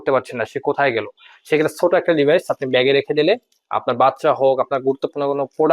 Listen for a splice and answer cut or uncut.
uncut